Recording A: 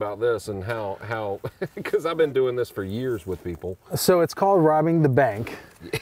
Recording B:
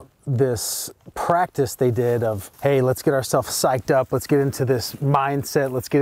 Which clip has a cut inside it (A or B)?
B